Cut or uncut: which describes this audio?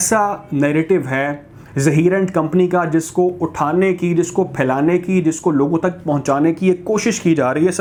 uncut